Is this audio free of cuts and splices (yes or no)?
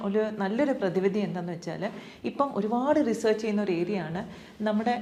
yes